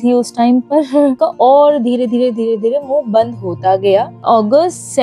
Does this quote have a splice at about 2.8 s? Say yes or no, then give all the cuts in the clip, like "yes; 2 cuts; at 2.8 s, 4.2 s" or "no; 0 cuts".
no; 2 cuts; at 1.2 s, 4.2 s